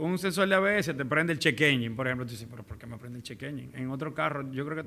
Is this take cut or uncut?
uncut